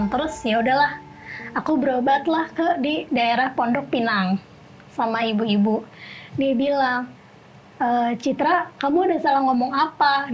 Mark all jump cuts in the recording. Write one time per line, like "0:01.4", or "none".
none